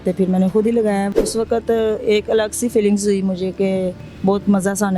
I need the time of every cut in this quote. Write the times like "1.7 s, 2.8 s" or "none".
1.1 s, 4.0 s